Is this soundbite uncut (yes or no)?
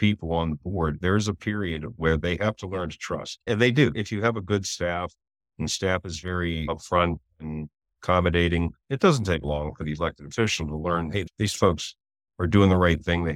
no